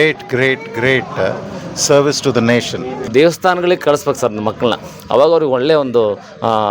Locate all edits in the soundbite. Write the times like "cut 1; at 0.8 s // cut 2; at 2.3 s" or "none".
cut 1; at 3.1 s